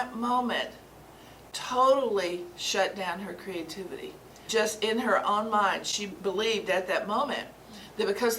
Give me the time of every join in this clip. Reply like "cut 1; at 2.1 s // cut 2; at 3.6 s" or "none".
cut 1; at 4.4 s // cut 2; at 6.1 s